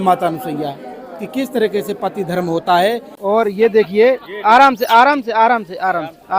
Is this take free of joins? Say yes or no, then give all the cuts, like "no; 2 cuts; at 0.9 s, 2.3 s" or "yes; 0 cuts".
no; 1 cut; at 3.1 s